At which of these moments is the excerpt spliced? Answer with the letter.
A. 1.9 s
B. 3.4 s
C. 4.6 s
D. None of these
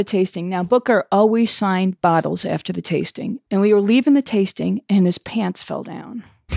B